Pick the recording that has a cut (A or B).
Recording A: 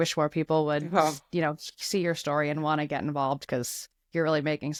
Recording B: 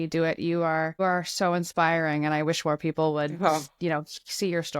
B